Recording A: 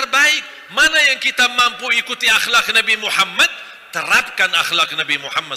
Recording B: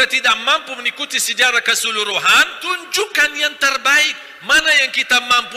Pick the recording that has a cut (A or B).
B